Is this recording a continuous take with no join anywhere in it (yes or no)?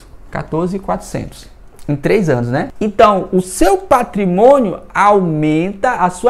yes